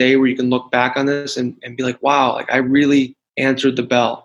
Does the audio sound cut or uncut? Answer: cut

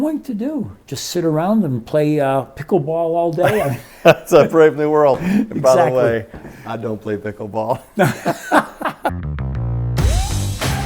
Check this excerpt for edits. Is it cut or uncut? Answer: cut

